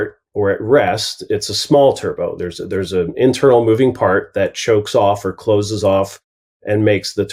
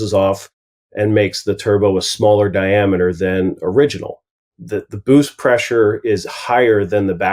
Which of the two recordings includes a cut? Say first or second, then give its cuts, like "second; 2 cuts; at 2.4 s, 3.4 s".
second; 1 cut; at 4.5 s